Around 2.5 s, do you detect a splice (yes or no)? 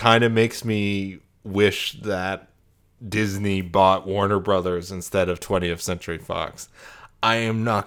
no